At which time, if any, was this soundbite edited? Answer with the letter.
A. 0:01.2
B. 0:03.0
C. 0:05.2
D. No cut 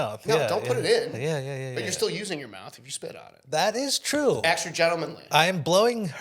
C